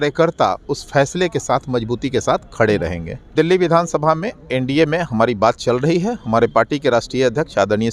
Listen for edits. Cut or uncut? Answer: cut